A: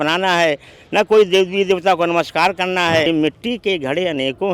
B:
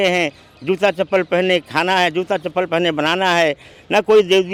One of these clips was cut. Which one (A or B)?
A